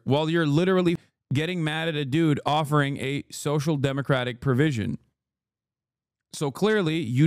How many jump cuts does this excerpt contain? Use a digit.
1